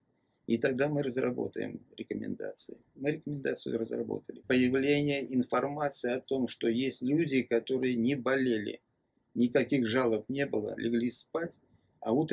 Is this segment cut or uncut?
cut